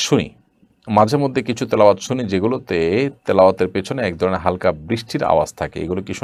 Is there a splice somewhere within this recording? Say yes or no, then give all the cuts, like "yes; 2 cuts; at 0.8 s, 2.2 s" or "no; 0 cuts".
no; 0 cuts